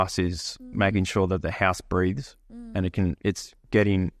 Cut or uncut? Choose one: uncut